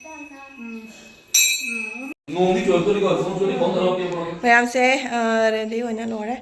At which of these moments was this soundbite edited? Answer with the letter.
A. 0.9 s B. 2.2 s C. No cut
B